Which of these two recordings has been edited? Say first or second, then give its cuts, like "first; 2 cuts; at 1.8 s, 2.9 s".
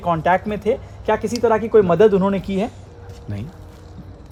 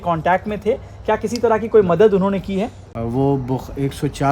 second; 1 cut; at 2.8 s